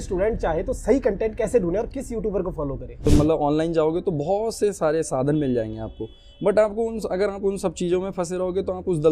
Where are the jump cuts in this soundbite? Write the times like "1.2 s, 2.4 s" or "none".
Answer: 3.1 s